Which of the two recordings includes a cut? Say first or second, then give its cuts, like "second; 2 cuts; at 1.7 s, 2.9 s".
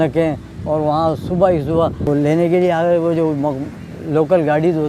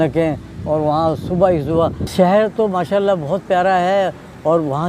second; 1 cut; at 2.0 s